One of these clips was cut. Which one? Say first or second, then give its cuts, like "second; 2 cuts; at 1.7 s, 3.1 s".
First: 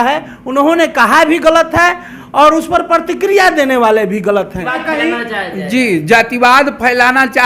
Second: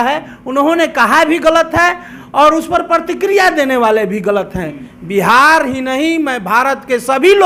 first; 1 cut; at 4.8 s